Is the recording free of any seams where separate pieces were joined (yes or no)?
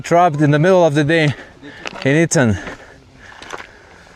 yes